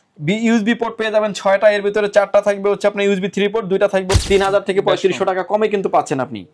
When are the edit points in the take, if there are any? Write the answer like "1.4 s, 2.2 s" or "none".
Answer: 4.2 s